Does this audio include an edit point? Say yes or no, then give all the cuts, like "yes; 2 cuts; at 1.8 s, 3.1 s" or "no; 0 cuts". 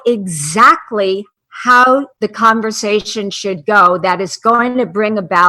yes; 1 cut; at 2.1 s